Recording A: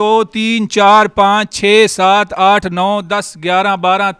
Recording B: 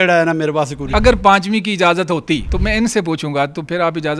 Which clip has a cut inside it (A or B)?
B